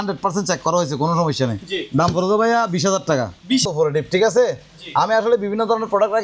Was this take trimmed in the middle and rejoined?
yes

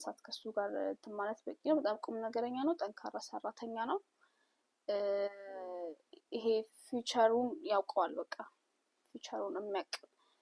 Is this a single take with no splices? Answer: yes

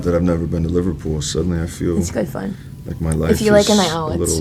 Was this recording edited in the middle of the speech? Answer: no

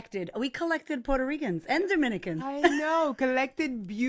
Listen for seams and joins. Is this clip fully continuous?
yes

